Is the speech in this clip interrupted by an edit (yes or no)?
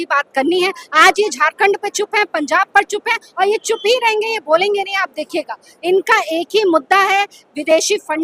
no